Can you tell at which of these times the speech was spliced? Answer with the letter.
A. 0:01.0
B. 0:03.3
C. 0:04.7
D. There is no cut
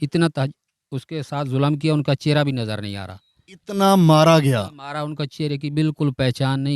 D